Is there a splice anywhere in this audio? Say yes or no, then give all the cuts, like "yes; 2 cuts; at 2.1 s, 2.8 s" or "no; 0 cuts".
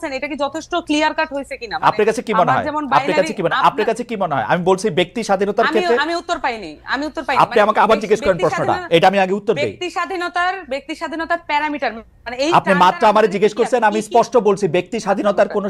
no; 0 cuts